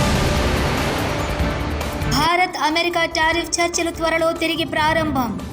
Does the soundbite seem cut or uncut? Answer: cut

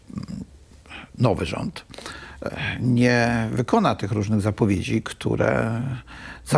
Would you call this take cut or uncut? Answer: uncut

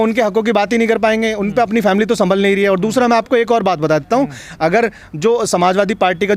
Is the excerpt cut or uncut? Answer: uncut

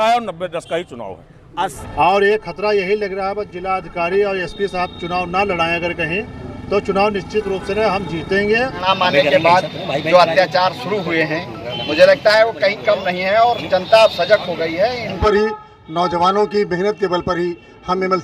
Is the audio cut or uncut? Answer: cut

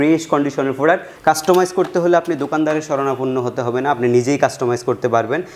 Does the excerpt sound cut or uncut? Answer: cut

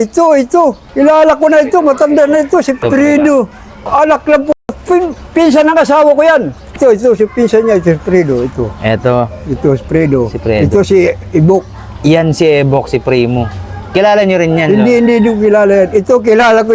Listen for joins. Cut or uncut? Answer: uncut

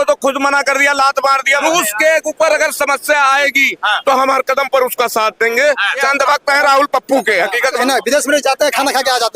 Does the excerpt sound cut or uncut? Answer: cut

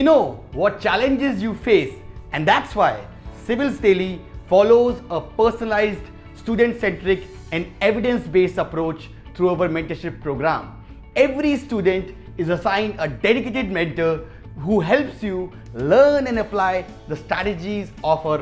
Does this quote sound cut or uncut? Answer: uncut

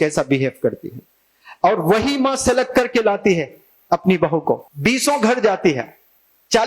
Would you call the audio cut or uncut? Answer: cut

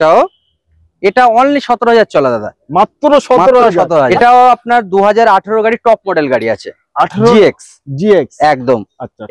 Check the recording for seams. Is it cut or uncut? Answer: cut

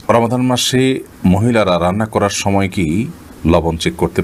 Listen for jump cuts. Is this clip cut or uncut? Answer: uncut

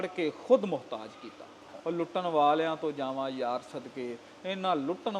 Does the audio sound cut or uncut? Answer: cut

